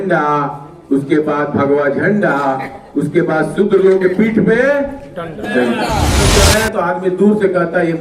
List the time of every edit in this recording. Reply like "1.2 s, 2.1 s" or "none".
6.2 s

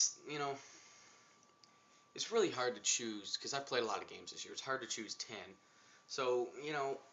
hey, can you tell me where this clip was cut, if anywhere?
5.1 s

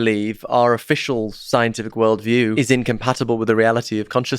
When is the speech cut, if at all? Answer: 2.5 s

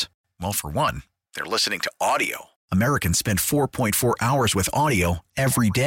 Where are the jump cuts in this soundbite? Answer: none

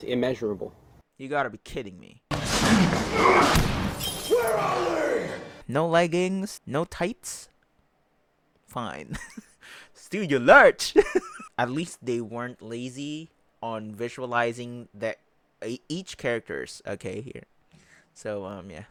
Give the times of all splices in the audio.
none

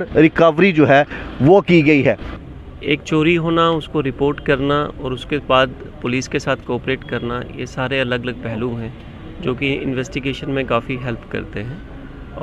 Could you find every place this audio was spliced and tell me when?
2.3 s

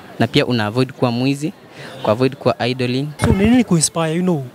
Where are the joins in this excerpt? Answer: 3.1 s

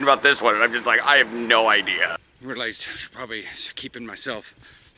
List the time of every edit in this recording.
2.3 s

